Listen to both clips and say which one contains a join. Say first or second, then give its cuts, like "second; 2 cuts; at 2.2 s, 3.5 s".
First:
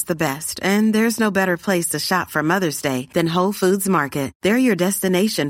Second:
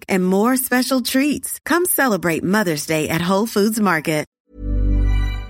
second; 1 cut; at 4.4 s